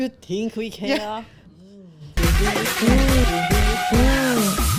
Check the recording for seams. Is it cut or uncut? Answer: uncut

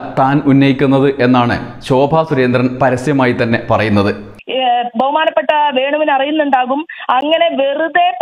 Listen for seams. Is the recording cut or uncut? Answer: uncut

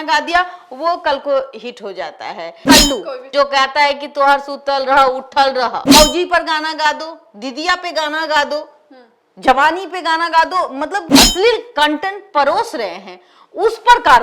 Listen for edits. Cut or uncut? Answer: cut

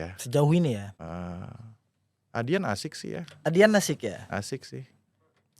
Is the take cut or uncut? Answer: cut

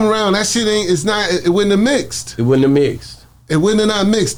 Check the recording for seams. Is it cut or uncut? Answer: uncut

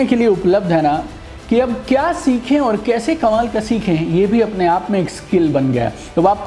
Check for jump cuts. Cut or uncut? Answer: uncut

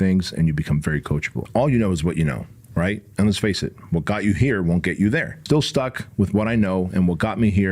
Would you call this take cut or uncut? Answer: cut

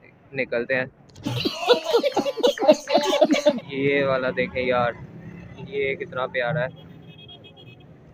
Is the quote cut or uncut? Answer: uncut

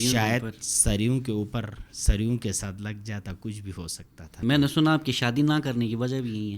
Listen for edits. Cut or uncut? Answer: cut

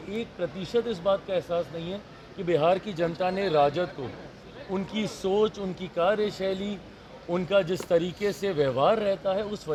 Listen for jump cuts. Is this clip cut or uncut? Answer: uncut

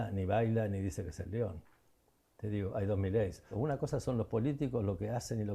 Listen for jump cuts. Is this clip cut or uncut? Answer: cut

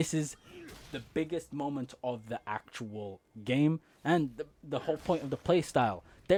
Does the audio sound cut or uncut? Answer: uncut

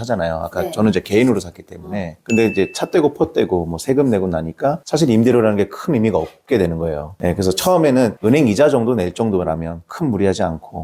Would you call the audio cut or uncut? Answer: uncut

